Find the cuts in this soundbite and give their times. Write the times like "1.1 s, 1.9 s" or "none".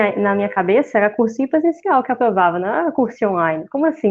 none